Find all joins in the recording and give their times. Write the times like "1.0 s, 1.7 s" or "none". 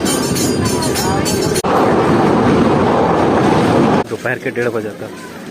1.6 s, 4.0 s